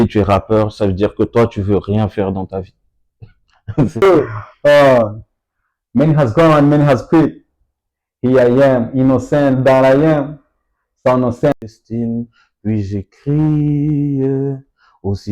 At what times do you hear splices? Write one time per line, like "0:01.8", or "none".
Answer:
0:04.0
0:11.5